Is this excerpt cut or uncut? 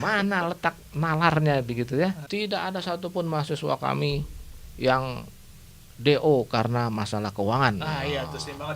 cut